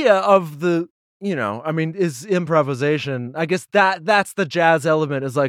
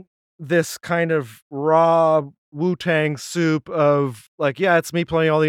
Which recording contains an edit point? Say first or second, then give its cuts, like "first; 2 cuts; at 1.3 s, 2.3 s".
second; 3 cuts; at 1.4 s, 2.4 s, 4.2 s